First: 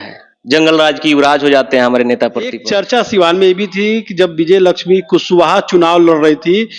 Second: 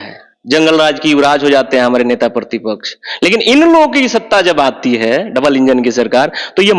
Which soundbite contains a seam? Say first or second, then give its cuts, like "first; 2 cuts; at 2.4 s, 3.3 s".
first; 1 cut; at 2.6 s